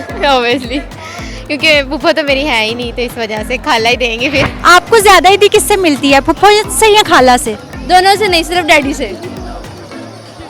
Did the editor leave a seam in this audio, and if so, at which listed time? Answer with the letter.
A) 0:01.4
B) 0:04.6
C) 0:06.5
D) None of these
B